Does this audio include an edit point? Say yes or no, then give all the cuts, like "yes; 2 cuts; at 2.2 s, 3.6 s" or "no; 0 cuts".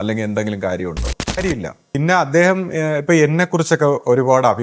yes; 1 cut; at 1.4 s